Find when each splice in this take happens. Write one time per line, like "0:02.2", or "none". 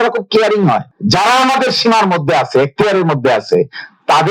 0:00.9